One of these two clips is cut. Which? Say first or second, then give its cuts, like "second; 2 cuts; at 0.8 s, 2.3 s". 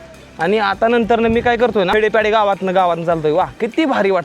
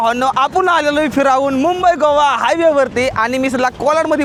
first; 1 cut; at 1.9 s